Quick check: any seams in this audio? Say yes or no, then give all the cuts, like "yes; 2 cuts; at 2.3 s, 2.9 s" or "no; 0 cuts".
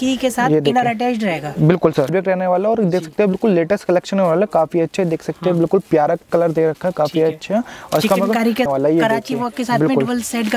yes; 2 cuts; at 2.1 s, 8.7 s